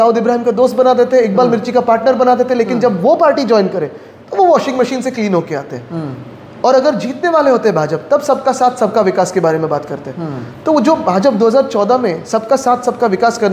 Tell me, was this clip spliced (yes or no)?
no